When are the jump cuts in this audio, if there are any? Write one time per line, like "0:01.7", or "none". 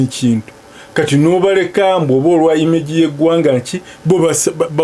none